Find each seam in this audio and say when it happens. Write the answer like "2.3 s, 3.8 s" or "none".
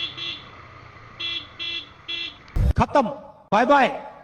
2.6 s